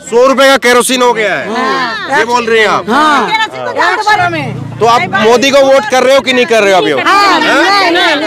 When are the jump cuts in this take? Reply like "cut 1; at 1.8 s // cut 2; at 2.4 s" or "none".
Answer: cut 1; at 4.2 s